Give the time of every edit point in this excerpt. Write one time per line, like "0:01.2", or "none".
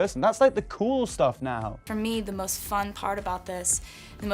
0:01.9